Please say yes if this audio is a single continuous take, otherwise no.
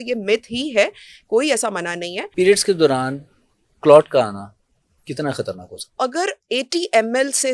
no